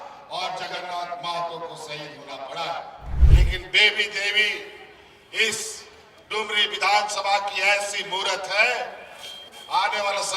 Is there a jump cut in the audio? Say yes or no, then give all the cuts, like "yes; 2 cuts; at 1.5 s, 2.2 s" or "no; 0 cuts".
yes; 1 cut; at 3.1 s